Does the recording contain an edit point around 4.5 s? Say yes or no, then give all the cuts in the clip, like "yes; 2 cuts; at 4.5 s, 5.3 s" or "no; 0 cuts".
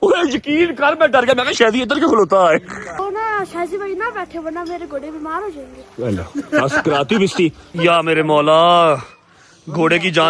no; 2 cuts; at 3.0 s, 7.7 s